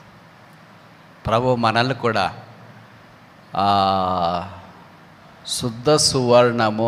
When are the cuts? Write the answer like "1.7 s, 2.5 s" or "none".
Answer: none